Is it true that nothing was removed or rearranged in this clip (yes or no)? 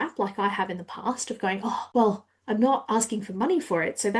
no